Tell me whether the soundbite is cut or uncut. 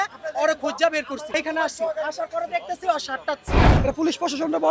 cut